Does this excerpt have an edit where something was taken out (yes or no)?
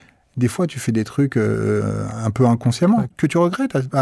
yes